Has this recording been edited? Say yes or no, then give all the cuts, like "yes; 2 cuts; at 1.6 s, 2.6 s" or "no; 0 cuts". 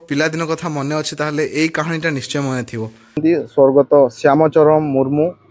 yes; 1 cut; at 3.2 s